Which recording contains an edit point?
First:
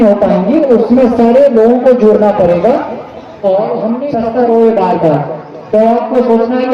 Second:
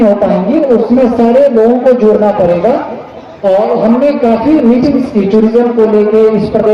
first; 1 cut; at 4.1 s

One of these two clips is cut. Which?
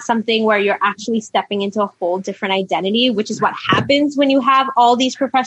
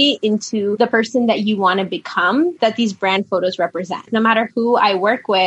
second; 3 cuts; at 0.8 s, 2.5 s, 4.1 s

